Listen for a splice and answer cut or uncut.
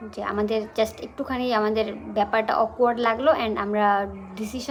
uncut